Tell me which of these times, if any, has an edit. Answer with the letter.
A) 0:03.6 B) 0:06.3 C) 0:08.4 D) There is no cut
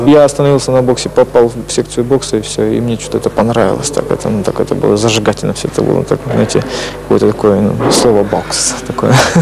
B